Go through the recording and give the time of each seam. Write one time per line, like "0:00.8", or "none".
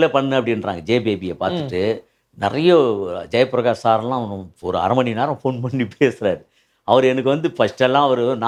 none